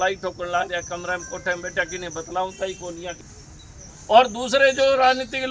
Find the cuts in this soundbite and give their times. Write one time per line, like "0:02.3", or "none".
0:03.2